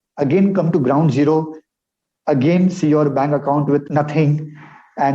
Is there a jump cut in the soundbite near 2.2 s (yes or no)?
no